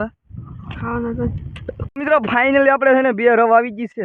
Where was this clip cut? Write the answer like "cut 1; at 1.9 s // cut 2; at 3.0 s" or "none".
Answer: cut 1; at 1.8 s